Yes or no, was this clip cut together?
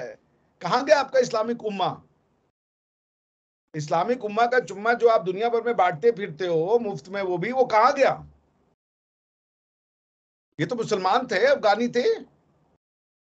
no